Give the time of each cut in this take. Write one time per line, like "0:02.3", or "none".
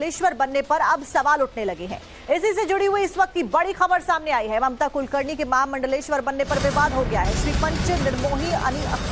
none

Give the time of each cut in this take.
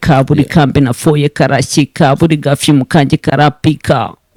none

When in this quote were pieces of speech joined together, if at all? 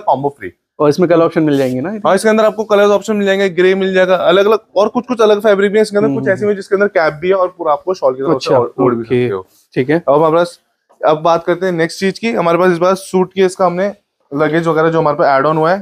none

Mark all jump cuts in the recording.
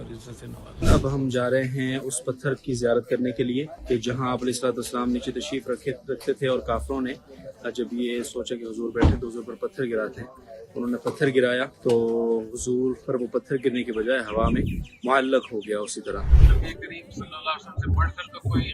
0:00.9
0:03.7
0:11.7
0:16.4

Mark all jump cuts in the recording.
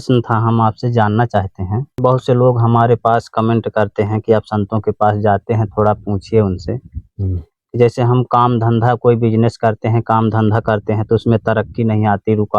0:02.0

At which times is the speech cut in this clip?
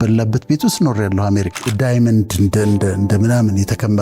0:01.7

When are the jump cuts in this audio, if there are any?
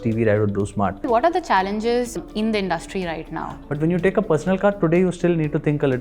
0:01.1
0:02.2
0:03.6

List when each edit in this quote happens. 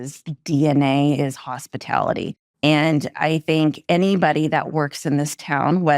0:02.4

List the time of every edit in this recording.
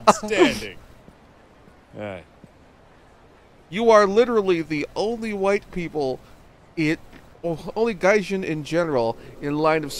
0:05.9

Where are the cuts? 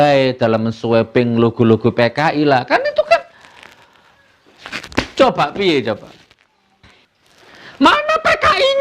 0:07.0

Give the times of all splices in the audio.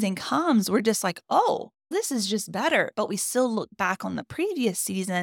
none

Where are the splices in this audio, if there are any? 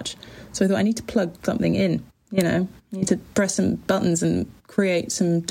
0:01.4

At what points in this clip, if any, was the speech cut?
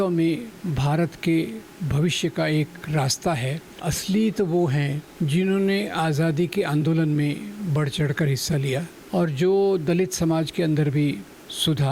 0:03.8
0:05.0
0:09.0

